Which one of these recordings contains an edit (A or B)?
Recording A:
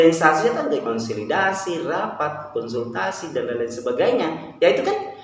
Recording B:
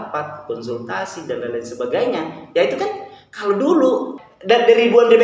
B